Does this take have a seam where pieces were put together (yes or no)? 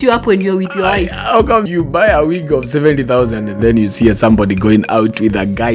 no